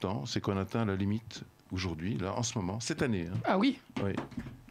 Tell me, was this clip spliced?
no; 0 cuts

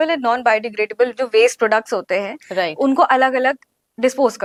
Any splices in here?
no; 0 cuts

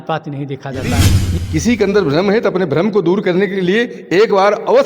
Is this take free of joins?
no; 1 cut; at 1.2 s

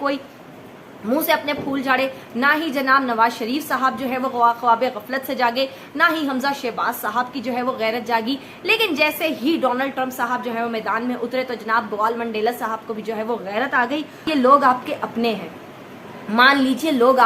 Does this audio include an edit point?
yes; 1 cut; at 14.3 s

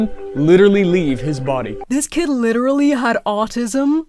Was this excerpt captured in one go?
no; 1 cut; at 1.8 s

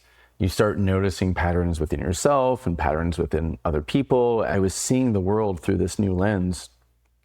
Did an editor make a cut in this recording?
yes; 1 cut; at 4.5 s

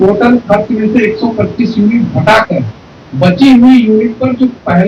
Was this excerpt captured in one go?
yes; 0 cuts

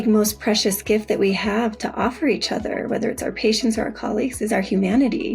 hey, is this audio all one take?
yes; 0 cuts

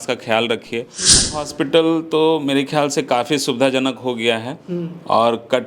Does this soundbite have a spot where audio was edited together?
yes; 1 cut; at 1.3 s

